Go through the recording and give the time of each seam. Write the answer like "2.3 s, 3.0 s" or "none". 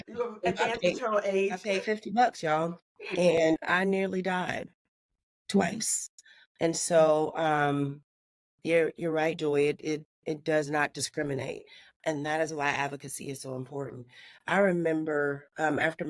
1.6 s, 3.4 s